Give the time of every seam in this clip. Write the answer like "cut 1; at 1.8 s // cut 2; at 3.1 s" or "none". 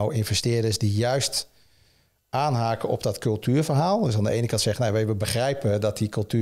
none